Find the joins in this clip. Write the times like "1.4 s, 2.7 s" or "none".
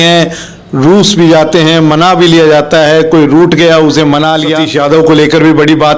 4.6 s